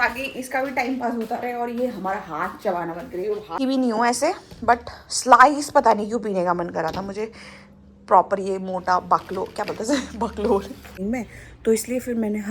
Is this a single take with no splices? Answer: no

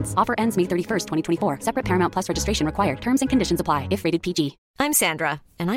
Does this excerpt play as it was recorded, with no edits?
no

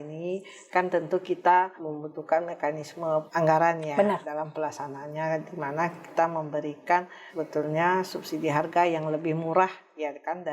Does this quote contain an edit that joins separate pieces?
yes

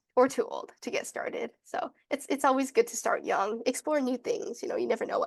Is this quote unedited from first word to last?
yes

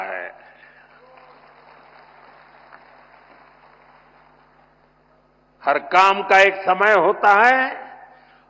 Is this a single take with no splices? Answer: no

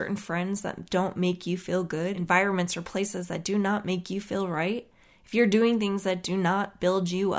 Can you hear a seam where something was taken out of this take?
yes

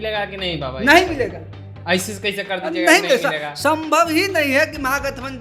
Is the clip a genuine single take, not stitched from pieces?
yes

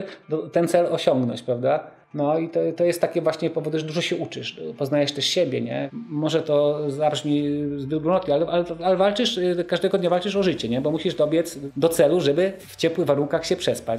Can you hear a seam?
yes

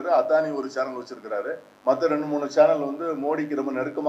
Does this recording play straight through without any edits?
no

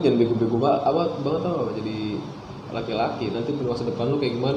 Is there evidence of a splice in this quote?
no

